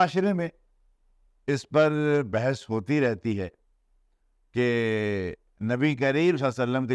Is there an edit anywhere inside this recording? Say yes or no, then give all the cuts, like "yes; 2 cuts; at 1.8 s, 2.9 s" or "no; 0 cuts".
no; 0 cuts